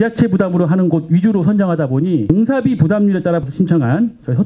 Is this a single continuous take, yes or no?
no